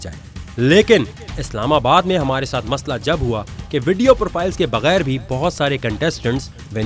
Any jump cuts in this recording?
no; 0 cuts

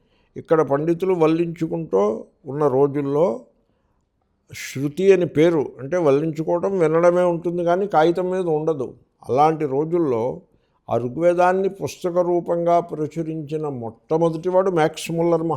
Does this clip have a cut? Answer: no; 0 cuts

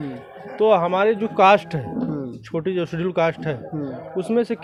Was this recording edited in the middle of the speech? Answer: no; 0 cuts

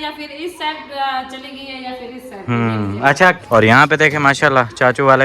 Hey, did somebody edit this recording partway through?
yes; 1 cut; at 3.4 s

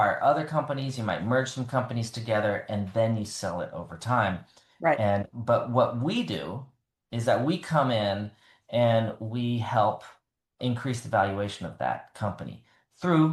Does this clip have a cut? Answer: no; 0 cuts

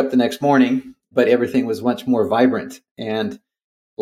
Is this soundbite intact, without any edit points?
yes; 0 cuts

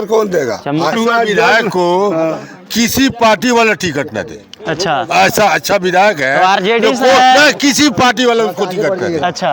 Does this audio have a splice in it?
yes; 1 cut; at 0.9 s

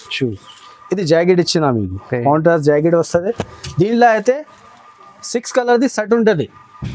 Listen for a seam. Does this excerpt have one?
no; 0 cuts

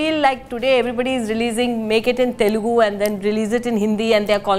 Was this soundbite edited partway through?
no; 0 cuts

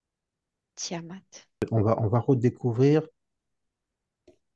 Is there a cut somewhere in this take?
yes; 1 cut; at 1.6 s

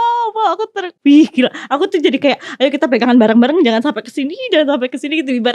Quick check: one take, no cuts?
no; 1 cut; at 0.9 s

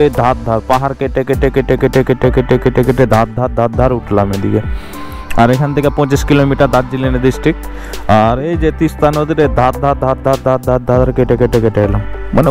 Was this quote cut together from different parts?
no; 0 cuts

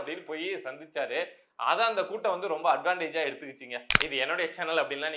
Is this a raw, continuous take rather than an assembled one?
no; 1 cut; at 4.0 s

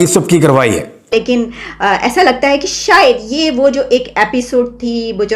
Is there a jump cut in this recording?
yes; 1 cut; at 0.9 s

